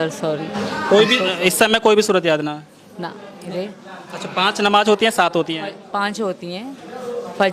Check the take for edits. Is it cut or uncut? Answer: cut